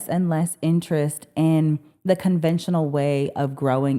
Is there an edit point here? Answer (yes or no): no